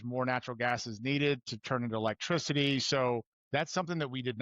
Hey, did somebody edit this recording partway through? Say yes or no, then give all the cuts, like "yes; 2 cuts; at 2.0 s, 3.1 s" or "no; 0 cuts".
yes; 1 cut; at 3.4 s